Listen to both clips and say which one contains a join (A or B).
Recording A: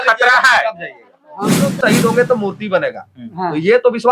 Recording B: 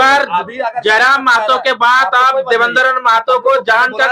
A